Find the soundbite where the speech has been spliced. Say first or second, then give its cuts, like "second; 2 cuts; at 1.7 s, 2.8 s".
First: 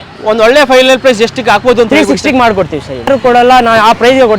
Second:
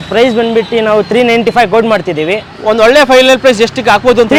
first; 1 cut; at 3.1 s